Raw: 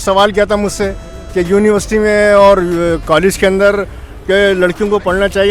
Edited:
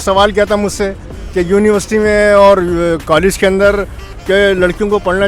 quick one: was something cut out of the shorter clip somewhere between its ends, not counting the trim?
no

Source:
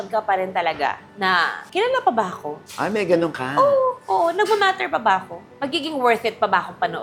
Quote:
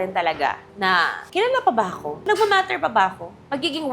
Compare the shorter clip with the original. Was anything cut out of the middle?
yes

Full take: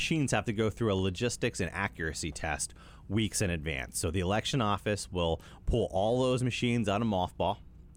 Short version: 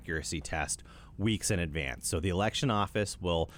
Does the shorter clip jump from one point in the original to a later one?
no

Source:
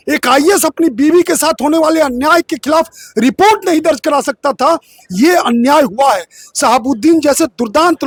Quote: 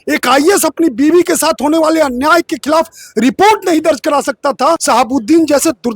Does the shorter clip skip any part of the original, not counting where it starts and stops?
yes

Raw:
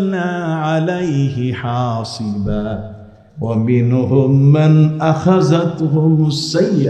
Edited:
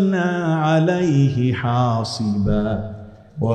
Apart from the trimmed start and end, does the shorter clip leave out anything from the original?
no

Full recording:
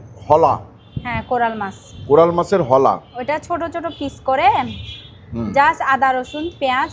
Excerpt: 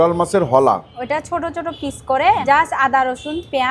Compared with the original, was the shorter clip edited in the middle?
yes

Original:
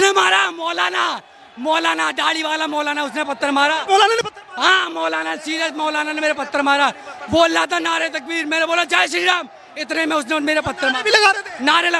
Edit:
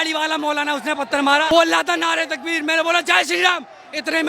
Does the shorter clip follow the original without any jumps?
no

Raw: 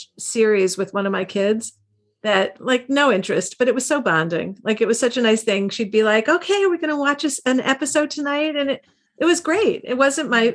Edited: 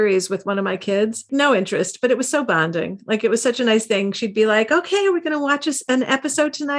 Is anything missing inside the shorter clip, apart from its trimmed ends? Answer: yes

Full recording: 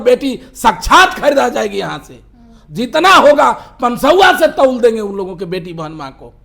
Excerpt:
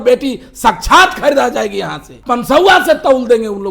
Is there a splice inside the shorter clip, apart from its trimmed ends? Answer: yes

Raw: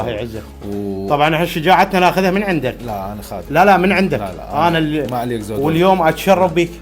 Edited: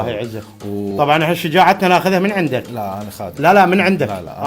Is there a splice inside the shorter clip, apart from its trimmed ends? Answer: yes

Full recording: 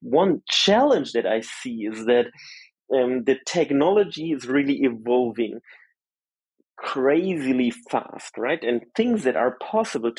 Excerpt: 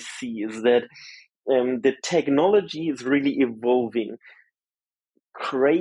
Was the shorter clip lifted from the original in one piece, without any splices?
yes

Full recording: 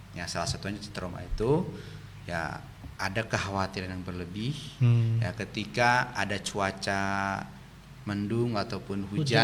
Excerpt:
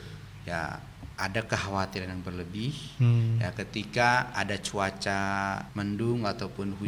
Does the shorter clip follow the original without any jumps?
no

